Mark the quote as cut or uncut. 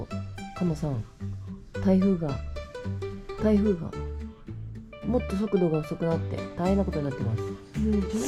uncut